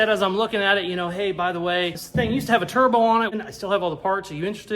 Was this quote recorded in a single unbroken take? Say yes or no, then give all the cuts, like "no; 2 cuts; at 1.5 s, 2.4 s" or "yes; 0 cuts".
no; 2 cuts; at 2.0 s, 3.3 s